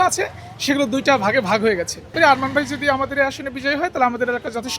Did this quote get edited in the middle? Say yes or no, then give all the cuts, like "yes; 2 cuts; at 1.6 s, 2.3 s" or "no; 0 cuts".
yes; 1 cut; at 2.1 s